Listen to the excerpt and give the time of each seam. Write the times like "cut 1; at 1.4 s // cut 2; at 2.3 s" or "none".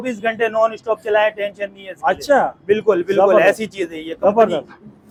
none